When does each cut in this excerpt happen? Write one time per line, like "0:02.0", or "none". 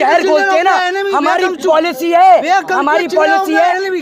none